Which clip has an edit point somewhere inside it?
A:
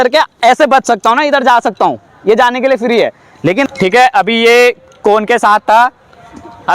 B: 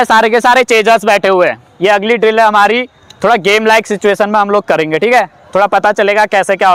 A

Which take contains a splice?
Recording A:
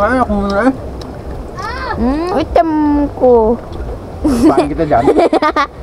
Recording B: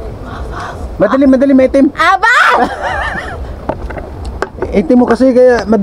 A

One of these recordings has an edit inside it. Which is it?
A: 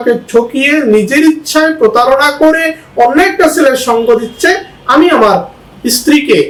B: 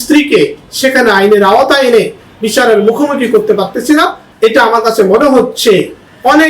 B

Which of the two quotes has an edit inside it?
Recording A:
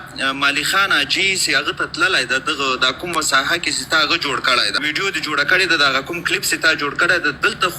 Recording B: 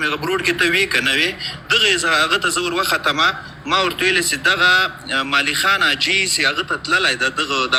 A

